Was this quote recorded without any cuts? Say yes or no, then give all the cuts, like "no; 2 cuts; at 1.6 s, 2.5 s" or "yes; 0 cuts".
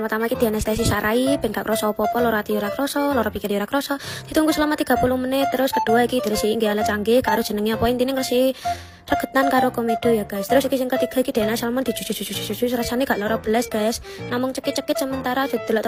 yes; 0 cuts